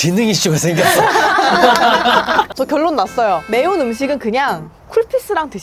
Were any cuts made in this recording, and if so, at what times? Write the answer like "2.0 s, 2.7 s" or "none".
2.5 s, 3.4 s